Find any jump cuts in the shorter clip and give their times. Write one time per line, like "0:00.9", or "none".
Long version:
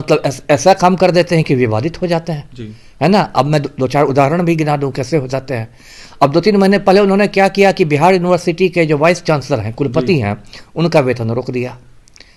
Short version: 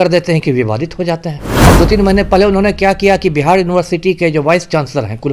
0:01.5